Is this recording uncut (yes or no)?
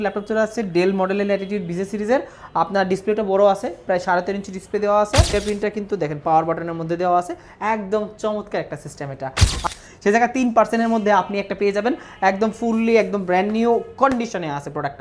no